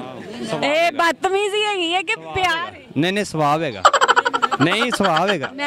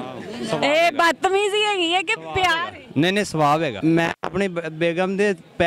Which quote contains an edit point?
second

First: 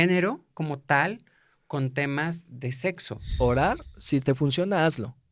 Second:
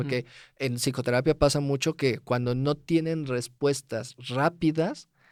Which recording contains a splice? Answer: first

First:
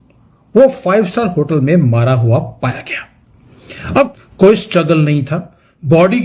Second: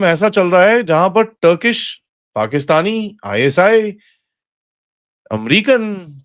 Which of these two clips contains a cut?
first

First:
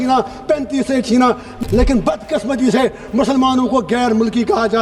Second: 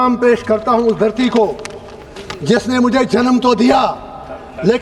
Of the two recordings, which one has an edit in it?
first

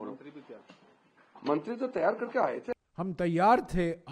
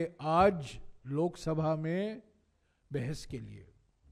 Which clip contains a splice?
first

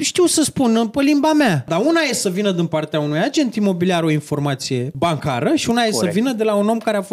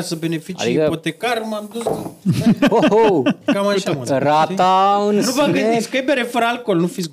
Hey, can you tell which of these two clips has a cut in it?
first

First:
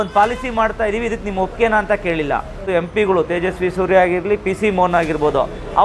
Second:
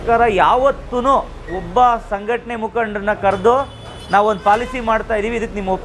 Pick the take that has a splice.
first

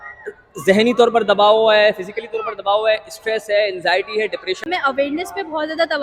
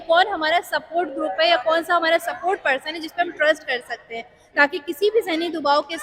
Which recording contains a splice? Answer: first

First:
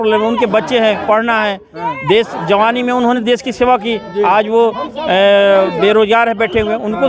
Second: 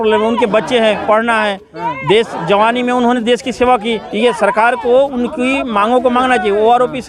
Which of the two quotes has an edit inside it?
second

